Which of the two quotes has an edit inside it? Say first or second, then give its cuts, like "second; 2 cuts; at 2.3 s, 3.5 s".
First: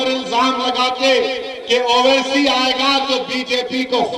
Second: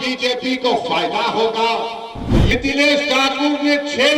second; 1 cut; at 2.5 s